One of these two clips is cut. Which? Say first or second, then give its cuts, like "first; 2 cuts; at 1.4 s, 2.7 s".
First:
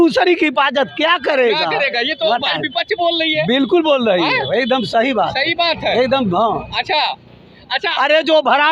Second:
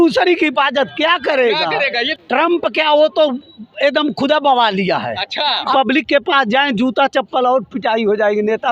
second; 2 cuts; at 2.1 s, 5.7 s